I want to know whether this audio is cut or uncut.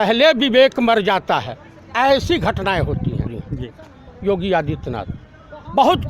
cut